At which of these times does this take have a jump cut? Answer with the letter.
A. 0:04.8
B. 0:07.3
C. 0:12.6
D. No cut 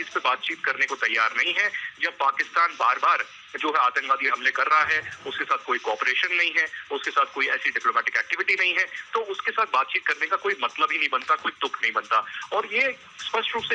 D